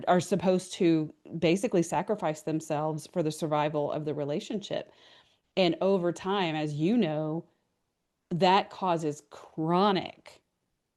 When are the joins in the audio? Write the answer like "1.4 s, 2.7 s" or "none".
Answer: none